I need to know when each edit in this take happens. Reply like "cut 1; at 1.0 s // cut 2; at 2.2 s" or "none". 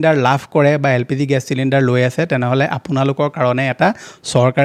none